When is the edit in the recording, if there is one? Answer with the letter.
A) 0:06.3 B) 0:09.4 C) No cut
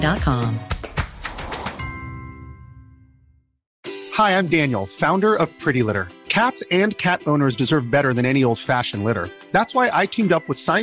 C